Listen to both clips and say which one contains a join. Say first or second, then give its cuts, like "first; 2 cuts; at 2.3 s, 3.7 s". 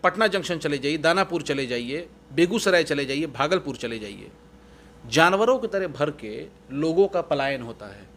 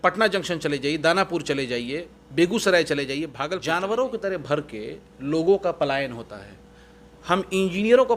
second; 1 cut; at 3.5 s